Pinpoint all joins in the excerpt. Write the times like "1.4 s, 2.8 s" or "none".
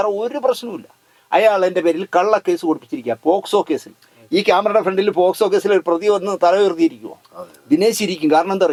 none